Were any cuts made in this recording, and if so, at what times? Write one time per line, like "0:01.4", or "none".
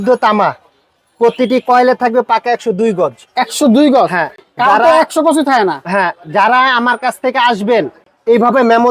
none